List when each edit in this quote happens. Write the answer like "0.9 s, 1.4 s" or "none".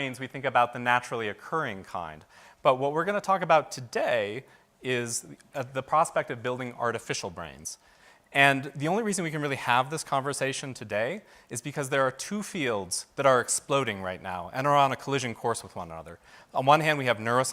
14.5 s